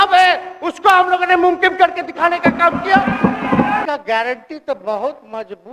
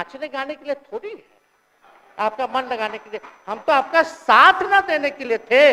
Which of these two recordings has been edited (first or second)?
first